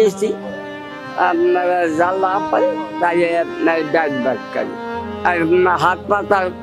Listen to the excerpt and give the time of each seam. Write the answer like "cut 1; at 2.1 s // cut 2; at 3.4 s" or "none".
cut 1; at 4.8 s